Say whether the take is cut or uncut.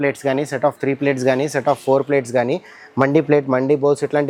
uncut